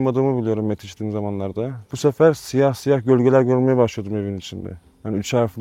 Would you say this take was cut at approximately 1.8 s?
yes; 1 cut; at 1.8 s

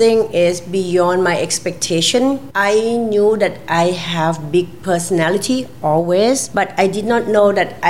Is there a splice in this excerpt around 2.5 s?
yes; 2 cuts; at 2.5 s, 6.5 s

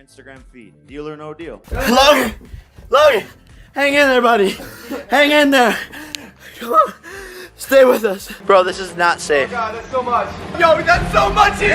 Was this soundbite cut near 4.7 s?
no; 2 cuts; at 1.7 s, 8.3 s

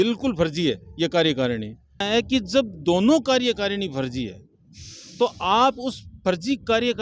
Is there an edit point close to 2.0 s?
yes; 1 cut; at 2.0 s

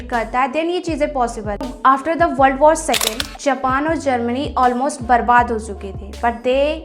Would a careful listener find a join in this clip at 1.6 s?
yes; 1 cut; at 1.6 s

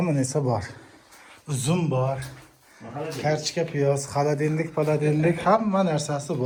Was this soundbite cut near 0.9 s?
no; 0 cuts

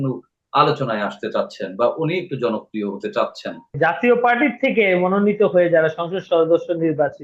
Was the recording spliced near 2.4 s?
no; 1 cut; at 3.8 s

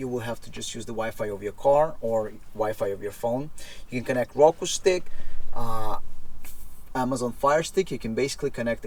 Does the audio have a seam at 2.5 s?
no; 0 cuts

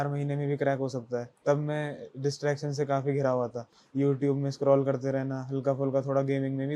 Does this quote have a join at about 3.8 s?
no; 0 cuts

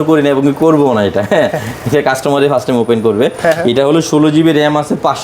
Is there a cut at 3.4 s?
no; 0 cuts

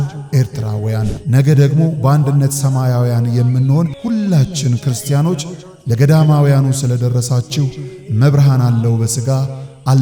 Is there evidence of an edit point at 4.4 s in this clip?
no; 0 cuts

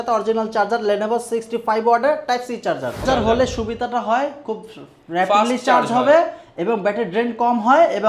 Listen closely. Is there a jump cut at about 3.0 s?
yes; 1 cut; at 3.0 s

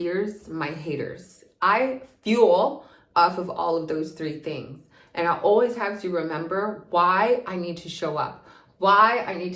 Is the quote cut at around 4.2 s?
no; 0 cuts

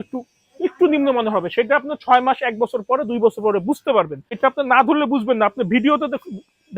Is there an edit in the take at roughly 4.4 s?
yes; 1 cut; at 4.4 s

